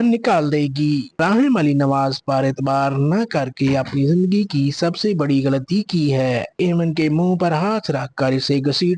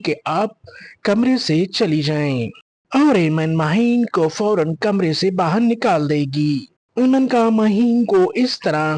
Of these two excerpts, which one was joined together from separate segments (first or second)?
first